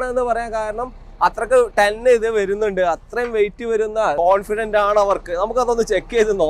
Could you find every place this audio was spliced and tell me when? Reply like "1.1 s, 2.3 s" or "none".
4.1 s